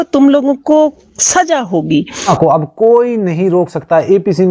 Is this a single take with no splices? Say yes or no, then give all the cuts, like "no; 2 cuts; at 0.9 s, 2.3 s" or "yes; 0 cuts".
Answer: no; 1 cut; at 2.3 s